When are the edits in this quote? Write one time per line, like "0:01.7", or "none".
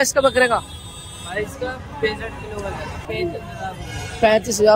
0:03.0

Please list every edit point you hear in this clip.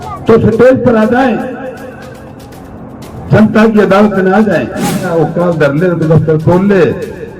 0:05.1

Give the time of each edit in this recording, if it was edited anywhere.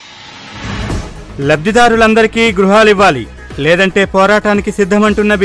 none

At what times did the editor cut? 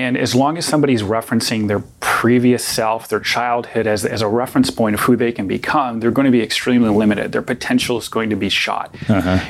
none

